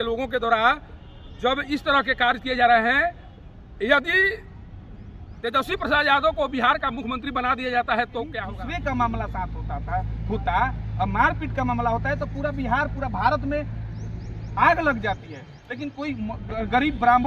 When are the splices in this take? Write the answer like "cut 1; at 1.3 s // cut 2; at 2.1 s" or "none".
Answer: cut 1; at 8.4 s